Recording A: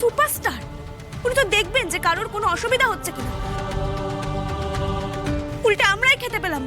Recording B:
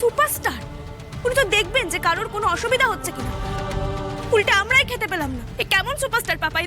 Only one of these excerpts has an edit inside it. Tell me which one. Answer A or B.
B